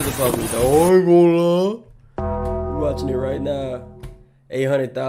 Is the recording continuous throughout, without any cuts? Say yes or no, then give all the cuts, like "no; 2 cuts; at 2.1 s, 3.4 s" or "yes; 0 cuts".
yes; 0 cuts